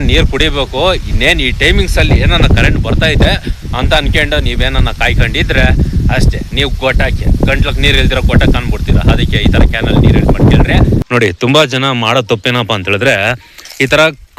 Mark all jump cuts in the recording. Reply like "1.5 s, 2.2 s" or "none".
11.0 s